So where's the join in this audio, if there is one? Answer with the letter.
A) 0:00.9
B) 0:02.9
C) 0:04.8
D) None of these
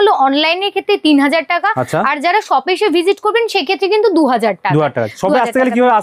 D